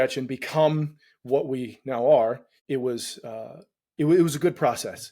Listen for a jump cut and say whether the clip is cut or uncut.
cut